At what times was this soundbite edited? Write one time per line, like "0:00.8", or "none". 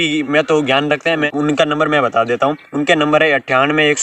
0:01.3